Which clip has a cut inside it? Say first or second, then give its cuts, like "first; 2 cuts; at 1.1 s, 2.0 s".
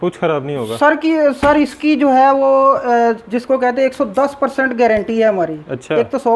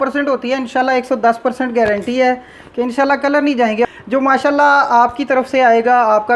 second; 1 cut; at 3.9 s